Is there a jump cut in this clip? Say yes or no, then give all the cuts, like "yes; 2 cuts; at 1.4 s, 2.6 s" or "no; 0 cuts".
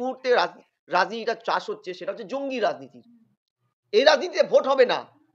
no; 0 cuts